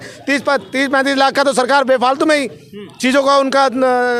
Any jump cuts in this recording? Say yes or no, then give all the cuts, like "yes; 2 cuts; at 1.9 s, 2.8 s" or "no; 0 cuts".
no; 0 cuts